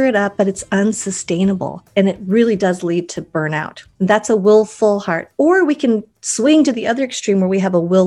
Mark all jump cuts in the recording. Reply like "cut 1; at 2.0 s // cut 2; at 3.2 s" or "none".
cut 1; at 1.8 s // cut 2; at 3.8 s